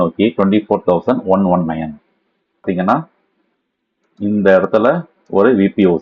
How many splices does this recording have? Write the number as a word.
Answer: one